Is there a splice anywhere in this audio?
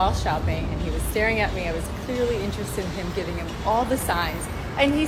no; 0 cuts

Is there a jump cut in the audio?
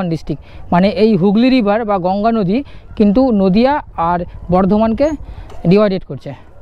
no; 0 cuts

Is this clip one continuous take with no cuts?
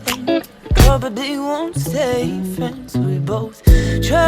no; 1 cut; at 1.7 s

